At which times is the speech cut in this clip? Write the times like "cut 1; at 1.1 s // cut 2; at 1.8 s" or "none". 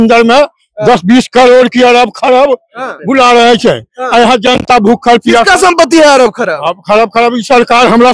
none